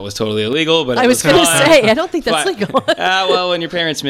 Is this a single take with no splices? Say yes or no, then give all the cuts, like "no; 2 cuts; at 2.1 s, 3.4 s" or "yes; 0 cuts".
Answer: yes; 0 cuts